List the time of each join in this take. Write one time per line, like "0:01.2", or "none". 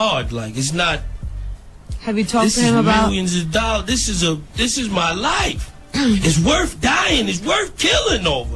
none